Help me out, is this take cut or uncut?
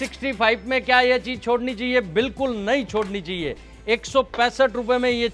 uncut